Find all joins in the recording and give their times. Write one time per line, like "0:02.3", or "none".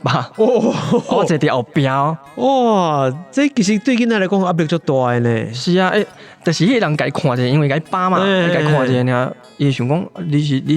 0:09.5